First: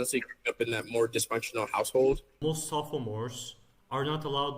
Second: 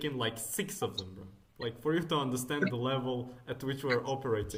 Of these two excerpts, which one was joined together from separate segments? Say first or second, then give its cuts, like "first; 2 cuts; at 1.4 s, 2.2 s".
first; 1 cut; at 2.3 s